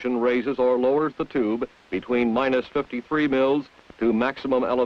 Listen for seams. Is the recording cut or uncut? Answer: cut